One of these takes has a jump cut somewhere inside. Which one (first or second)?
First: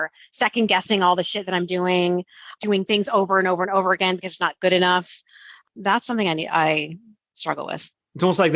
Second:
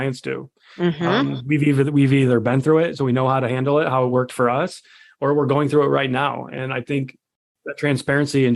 first